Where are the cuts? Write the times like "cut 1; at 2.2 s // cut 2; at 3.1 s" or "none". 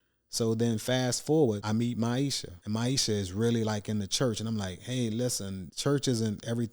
cut 1; at 1.6 s // cut 2; at 2.5 s // cut 3; at 5.6 s